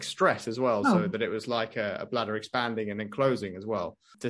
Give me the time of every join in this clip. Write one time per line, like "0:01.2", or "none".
none